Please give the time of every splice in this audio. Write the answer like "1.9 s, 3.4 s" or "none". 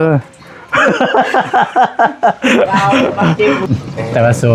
3.6 s